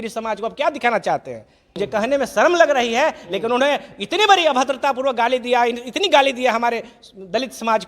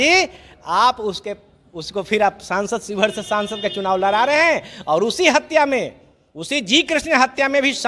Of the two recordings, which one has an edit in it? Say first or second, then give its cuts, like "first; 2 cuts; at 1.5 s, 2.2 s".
first; 1 cut; at 1.6 s